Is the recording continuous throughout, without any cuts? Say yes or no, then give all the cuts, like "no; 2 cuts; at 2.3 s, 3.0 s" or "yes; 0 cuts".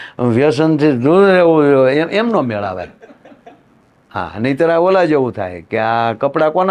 yes; 0 cuts